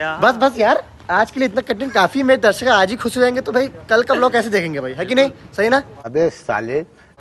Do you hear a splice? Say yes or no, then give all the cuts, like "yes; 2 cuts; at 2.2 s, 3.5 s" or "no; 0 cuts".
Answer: no; 0 cuts